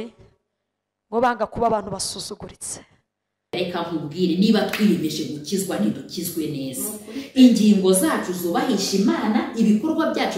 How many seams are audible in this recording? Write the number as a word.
one